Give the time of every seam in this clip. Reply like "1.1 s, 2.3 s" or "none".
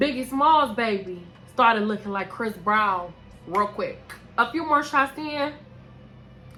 none